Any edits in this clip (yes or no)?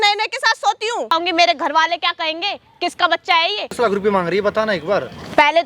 yes